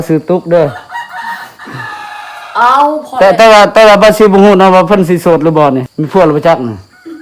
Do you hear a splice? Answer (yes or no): yes